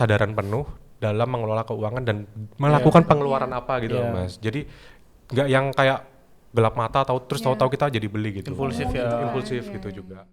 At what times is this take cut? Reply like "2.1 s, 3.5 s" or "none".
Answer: none